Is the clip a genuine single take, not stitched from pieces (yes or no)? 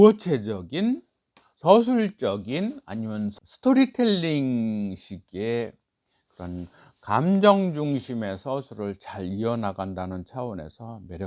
no